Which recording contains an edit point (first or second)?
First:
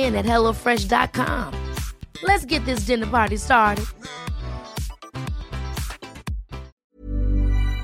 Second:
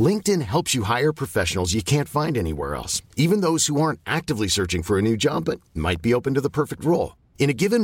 first